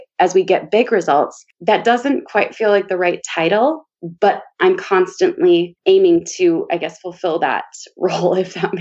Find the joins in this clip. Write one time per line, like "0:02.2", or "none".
none